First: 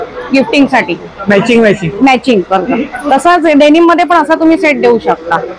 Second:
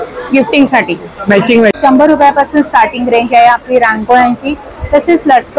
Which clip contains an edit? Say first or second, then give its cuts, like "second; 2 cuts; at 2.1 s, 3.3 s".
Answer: second; 1 cut; at 1.8 s